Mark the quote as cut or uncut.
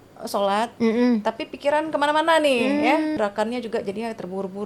cut